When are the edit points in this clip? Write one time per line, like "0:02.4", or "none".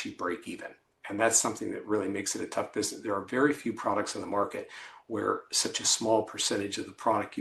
none